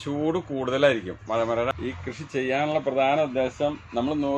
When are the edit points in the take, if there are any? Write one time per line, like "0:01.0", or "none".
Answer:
0:01.7